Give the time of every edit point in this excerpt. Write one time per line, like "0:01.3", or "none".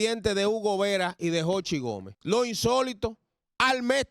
0:02.1